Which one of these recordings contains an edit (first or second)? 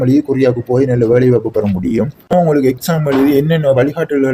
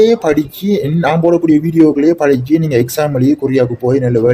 first